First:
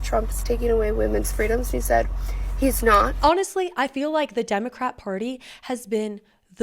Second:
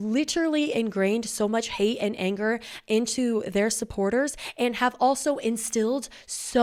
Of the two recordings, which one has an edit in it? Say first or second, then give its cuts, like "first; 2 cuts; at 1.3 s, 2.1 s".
first; 1 cut; at 3.1 s